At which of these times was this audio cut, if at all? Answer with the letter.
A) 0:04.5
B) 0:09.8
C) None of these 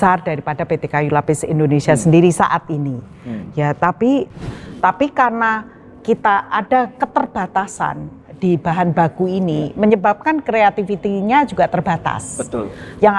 A